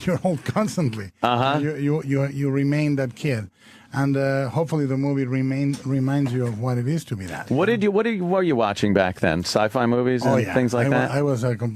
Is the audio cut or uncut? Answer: uncut